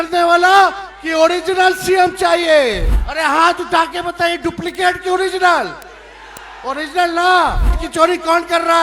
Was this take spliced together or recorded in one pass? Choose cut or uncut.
cut